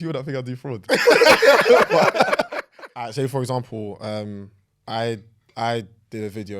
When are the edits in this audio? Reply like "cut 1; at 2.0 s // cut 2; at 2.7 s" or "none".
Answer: cut 1; at 2.6 s